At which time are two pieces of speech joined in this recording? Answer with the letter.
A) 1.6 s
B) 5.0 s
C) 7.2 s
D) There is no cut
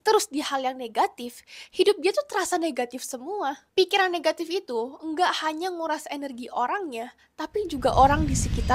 D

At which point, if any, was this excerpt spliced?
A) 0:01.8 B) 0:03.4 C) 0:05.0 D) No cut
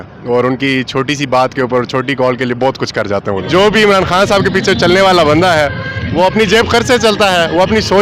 B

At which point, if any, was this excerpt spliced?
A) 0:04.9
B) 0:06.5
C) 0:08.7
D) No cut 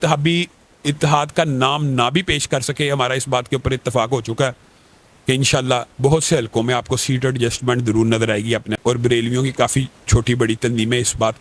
C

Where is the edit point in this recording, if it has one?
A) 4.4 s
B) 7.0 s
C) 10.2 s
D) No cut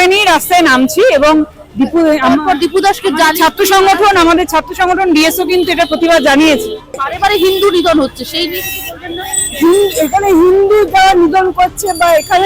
B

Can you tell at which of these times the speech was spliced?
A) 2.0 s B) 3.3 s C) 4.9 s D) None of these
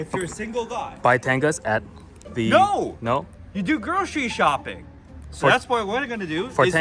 D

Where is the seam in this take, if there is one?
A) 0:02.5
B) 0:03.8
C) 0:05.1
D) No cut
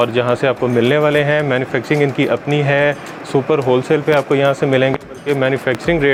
D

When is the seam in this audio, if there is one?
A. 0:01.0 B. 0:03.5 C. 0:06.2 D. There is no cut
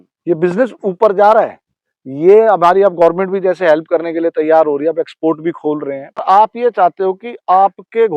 C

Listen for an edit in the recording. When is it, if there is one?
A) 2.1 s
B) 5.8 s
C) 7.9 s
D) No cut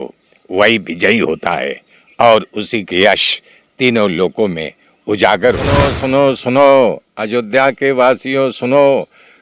B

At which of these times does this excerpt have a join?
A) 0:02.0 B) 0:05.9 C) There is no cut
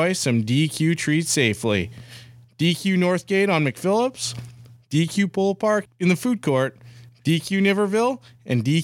B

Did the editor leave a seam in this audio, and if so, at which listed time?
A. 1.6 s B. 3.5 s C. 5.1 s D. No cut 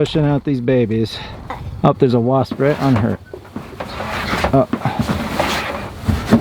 A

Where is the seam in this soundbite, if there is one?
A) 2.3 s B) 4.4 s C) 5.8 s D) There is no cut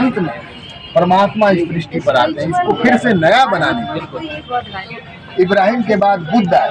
B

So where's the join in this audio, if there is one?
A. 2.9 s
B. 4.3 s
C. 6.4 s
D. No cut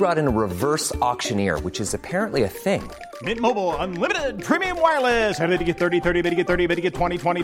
D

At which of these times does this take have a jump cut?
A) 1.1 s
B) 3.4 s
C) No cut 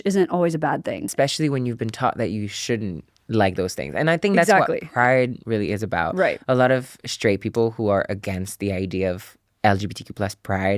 A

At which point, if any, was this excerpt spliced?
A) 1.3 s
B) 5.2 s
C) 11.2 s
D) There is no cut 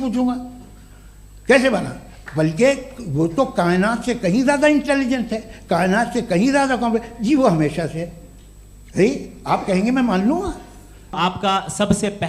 C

